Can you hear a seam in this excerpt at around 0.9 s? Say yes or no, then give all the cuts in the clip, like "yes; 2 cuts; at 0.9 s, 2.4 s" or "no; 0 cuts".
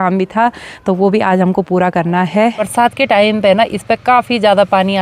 no; 1 cut; at 2.6 s